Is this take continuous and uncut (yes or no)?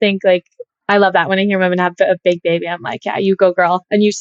yes